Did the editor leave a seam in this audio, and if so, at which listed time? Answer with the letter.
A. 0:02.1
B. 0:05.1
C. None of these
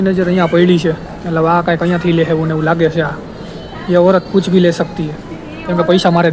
C